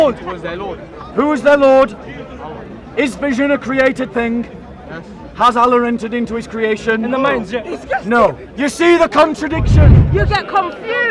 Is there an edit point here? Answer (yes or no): yes